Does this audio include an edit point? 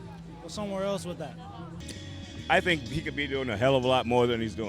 yes; 1 cut; at 1.8 s

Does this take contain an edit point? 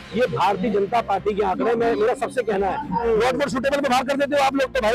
yes; 1 cut; at 3.0 s

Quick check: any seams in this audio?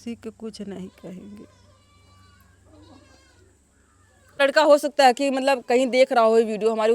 yes; 1 cut; at 4.4 s

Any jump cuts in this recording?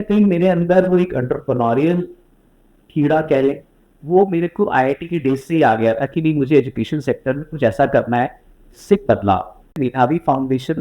yes; 1 cut; at 9.8 s

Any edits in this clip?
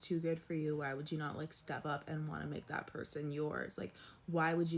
no; 0 cuts

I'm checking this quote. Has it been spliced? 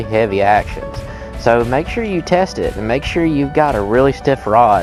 no; 0 cuts

